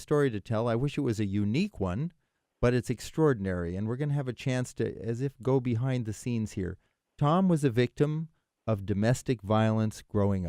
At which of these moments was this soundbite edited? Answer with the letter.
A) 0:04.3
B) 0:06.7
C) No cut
C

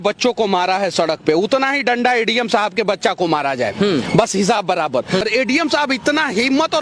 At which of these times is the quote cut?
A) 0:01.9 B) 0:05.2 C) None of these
B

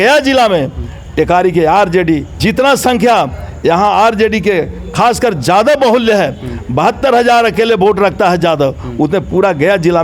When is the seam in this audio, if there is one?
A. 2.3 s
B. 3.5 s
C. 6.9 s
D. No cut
A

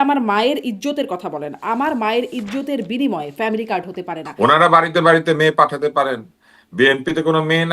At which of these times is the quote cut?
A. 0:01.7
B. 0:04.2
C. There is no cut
B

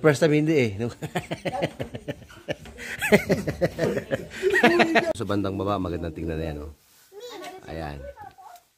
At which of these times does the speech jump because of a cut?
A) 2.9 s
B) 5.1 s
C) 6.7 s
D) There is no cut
B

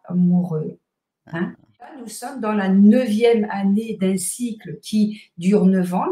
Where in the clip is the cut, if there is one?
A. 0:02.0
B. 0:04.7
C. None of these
A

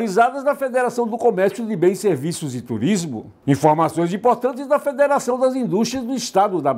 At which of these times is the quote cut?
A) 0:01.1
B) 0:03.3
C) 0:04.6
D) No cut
B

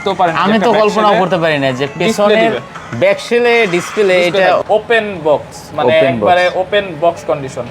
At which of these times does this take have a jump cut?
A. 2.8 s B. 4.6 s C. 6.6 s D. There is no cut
B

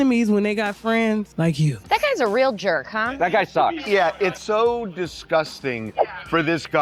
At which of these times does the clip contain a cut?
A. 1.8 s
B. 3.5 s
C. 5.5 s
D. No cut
D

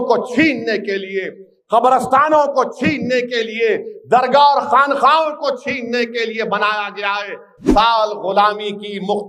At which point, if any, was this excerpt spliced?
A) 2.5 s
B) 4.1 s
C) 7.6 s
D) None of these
C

